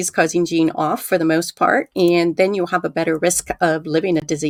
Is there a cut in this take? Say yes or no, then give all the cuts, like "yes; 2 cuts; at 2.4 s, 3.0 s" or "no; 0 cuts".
no; 0 cuts